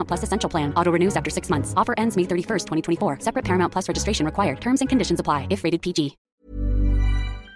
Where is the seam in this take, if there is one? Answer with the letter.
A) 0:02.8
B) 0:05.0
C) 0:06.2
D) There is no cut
C